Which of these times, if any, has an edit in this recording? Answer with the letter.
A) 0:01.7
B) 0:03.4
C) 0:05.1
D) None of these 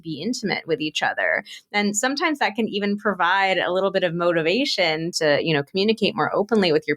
C